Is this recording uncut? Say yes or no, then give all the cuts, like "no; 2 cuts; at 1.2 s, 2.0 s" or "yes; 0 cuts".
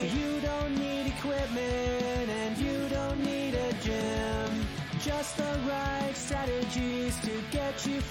yes; 0 cuts